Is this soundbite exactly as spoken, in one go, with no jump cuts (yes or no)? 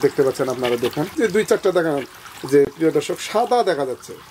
no